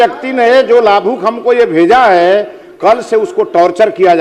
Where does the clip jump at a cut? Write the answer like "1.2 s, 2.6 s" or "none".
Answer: none